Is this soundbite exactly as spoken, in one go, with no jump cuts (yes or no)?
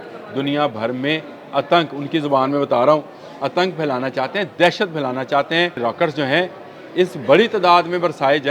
no